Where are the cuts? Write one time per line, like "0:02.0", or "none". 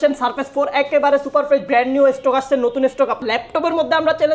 0:03.2